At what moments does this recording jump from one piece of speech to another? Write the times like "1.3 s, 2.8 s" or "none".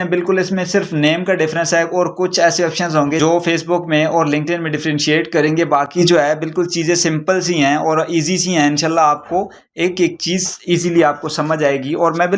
none